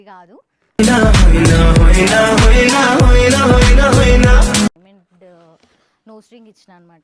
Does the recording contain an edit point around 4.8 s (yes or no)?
yes